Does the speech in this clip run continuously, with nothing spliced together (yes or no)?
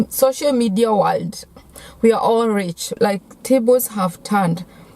no